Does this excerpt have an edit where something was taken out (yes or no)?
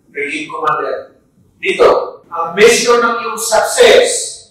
no